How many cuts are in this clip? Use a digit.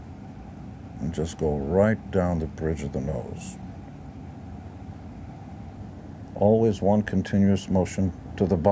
1